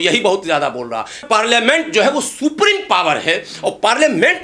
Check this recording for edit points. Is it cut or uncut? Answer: cut